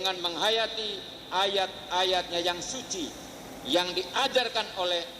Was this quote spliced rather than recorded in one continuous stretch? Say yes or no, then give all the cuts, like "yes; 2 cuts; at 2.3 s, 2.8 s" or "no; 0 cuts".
no; 0 cuts